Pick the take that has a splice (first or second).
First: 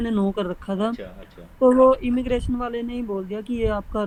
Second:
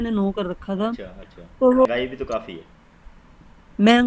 second